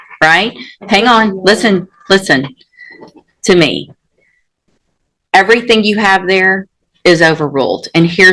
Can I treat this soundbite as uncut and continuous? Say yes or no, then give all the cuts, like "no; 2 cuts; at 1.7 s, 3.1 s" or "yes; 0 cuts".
yes; 0 cuts